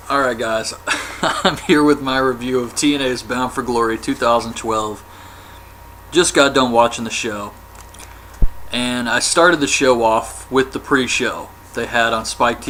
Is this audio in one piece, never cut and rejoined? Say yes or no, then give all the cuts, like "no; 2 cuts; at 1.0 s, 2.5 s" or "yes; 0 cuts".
yes; 0 cuts